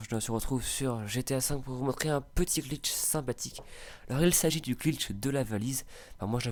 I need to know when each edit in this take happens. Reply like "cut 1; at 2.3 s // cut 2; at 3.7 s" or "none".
none